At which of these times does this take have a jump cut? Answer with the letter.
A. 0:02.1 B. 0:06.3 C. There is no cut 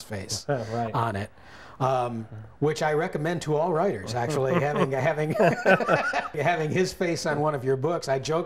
B